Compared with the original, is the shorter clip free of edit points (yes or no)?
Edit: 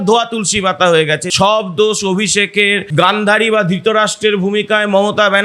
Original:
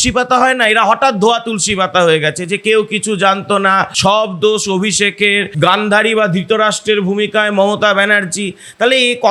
no